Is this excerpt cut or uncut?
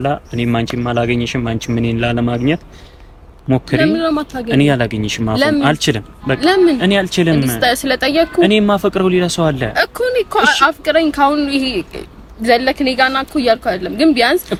uncut